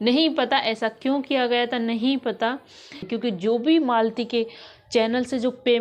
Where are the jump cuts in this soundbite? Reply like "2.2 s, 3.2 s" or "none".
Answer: 3.0 s